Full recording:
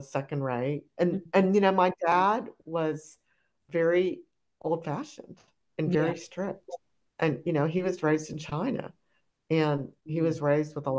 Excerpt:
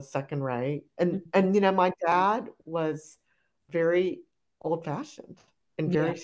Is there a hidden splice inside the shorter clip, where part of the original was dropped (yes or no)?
no